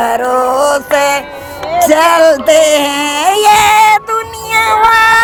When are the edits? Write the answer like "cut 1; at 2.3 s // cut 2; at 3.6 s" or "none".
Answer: none